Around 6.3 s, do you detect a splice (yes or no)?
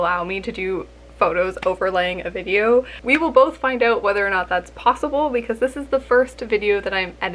no